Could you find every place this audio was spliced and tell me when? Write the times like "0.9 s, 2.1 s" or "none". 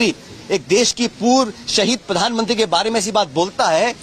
none